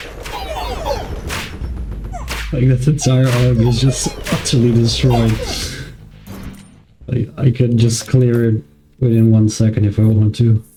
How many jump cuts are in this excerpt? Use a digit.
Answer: 0